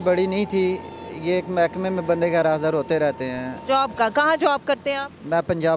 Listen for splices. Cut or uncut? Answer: cut